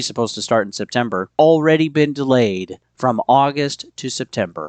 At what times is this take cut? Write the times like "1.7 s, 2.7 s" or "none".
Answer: 1.3 s